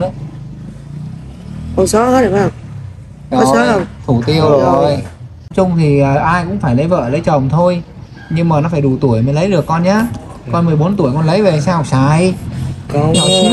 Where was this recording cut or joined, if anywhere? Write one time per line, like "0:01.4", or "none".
0:05.5

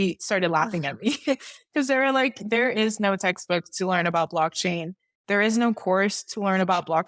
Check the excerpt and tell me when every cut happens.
none

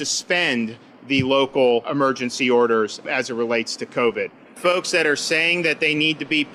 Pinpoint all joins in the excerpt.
0:00.9
0:01.9
0:03.0
0:04.5

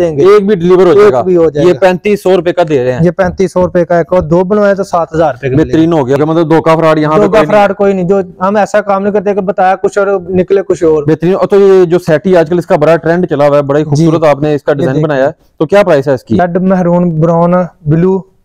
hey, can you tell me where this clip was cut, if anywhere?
0:06.2
0:16.4

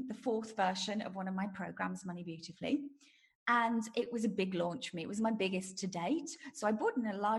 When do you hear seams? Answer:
none

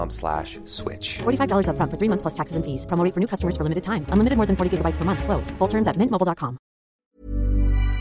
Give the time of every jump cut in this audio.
0:07.1

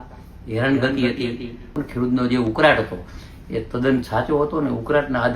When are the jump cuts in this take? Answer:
0:01.8

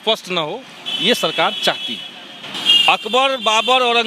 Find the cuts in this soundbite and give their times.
0:02.4

